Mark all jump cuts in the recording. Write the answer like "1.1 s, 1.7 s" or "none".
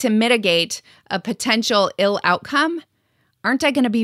none